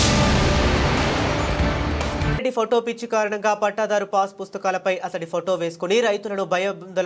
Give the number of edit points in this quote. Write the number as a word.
one